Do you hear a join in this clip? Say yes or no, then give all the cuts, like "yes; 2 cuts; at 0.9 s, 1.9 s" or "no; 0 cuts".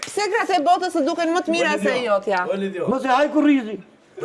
no; 0 cuts